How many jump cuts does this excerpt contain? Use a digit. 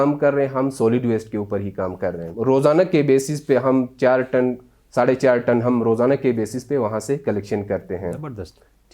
1